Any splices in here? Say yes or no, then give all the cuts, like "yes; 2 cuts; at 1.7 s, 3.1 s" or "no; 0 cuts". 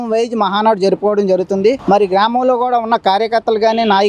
no; 0 cuts